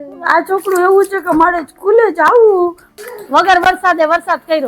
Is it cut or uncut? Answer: cut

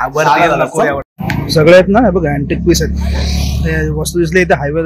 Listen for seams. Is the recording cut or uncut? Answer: cut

